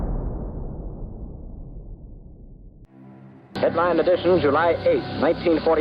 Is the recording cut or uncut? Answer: cut